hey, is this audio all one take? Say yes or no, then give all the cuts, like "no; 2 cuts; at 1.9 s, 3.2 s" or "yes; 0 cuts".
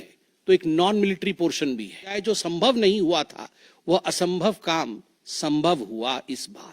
no; 1 cut; at 2.1 s